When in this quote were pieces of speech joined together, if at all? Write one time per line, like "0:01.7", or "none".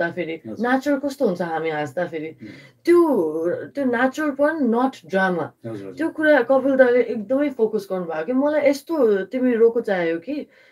none